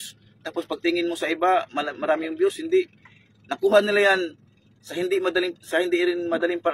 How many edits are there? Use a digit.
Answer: 0